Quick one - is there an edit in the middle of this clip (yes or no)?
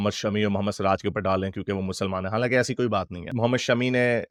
no